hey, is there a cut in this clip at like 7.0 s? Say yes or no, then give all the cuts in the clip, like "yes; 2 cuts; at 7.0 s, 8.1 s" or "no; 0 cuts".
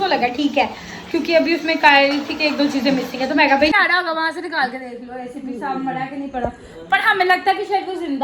no; 1 cut; at 3.8 s